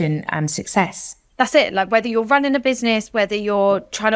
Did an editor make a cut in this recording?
no; 0 cuts

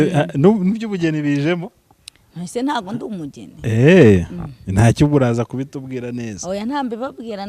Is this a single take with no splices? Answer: yes; 0 cuts

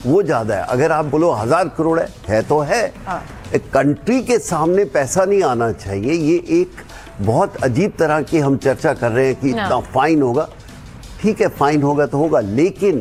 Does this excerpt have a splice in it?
no; 0 cuts

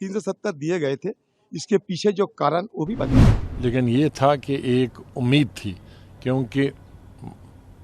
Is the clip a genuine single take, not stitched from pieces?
no; 1 cut; at 3.4 s

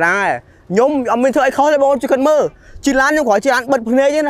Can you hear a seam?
no; 0 cuts

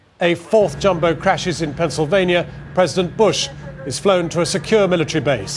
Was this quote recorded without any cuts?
no; 1 cut; at 4.3 s

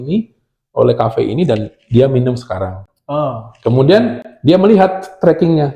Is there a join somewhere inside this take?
no; 0 cuts

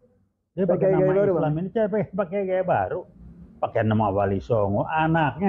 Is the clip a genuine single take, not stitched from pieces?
yes; 0 cuts

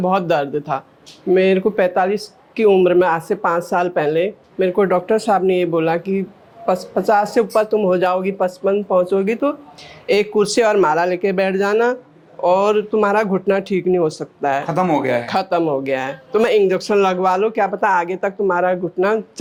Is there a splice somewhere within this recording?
no; 0 cuts

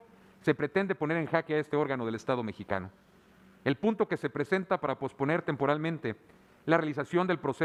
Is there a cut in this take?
no; 0 cuts

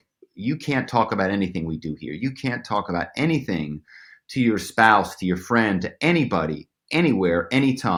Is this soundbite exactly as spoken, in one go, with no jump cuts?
yes; 0 cuts

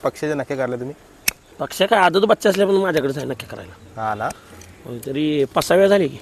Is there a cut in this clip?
no; 0 cuts

